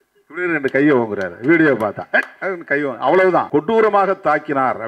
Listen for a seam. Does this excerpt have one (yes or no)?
yes